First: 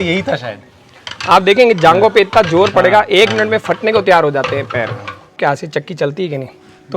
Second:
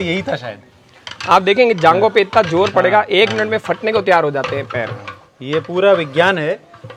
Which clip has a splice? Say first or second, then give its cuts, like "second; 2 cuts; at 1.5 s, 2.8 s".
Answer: first; 1 cut; at 5.4 s